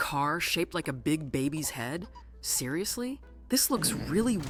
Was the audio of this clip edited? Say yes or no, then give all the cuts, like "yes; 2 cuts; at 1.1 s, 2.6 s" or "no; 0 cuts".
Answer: no; 0 cuts